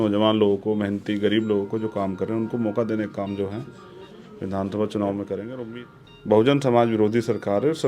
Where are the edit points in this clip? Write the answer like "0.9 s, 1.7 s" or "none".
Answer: 5.5 s